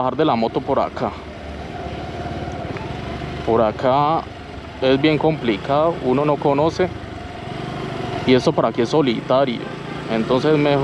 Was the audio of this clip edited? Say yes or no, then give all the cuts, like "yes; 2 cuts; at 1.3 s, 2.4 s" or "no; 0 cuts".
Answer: no; 0 cuts